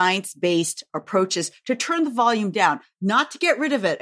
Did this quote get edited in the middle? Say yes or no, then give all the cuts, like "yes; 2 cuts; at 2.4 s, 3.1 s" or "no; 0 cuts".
no; 0 cuts